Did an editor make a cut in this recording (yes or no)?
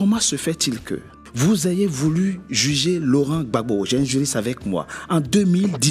yes